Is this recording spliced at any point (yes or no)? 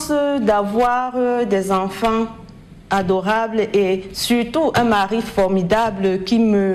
no